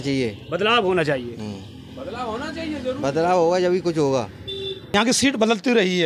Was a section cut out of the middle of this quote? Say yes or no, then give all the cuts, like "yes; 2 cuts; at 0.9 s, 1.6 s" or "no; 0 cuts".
yes; 1 cut; at 4.8 s